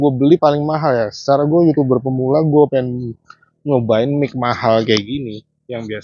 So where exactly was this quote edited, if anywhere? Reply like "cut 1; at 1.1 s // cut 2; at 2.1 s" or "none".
none